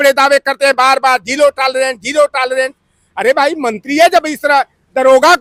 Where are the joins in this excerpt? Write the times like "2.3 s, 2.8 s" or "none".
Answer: none